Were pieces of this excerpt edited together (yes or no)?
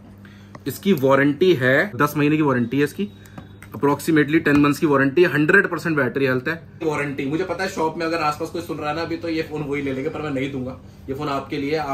yes